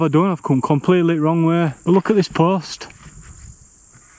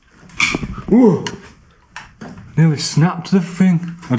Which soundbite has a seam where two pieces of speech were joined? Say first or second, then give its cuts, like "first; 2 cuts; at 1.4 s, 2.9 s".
first; 1 cut; at 1.8 s